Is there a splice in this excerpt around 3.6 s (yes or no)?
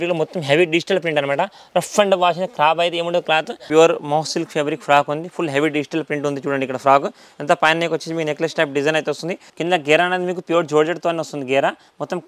yes